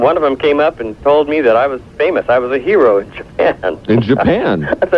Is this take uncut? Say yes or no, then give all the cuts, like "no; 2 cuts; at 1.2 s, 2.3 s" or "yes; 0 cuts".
yes; 0 cuts